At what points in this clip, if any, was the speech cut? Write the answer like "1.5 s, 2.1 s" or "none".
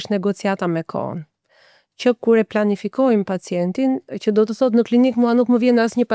none